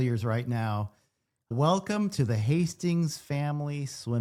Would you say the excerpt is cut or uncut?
uncut